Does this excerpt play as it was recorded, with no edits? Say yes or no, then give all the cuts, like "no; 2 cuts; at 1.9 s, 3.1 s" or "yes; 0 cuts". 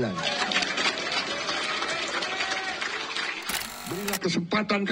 no; 1 cut; at 4.0 s